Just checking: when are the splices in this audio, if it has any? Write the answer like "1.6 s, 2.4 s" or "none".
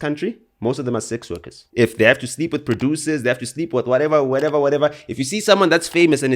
1.6 s